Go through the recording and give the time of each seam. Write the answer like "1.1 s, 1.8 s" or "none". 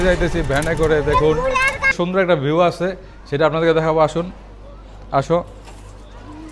1.9 s